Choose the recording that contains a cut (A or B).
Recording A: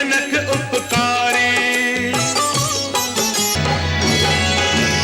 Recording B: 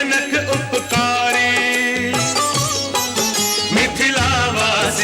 A